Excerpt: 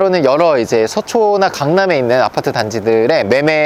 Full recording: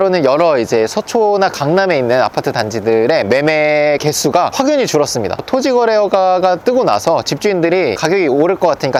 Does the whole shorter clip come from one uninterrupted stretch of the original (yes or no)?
yes